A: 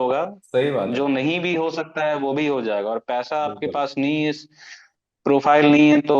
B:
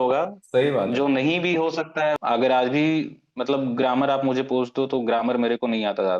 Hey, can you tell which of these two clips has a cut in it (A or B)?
B